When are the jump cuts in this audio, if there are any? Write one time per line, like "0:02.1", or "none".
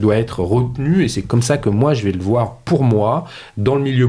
none